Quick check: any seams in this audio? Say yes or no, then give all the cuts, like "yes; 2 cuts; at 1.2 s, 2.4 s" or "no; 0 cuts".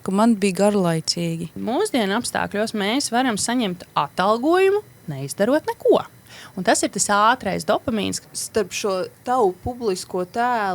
yes; 2 cuts; at 1.5 s, 8.2 s